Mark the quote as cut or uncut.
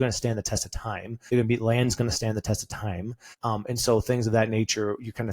cut